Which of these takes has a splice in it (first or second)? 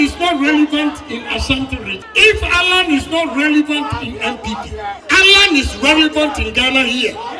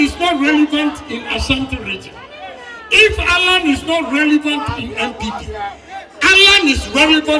first